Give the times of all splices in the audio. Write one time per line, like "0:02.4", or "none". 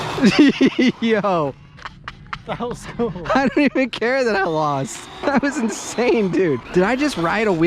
0:05.2
0:06.6